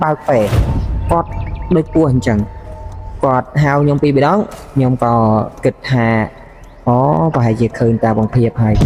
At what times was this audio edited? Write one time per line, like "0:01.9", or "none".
none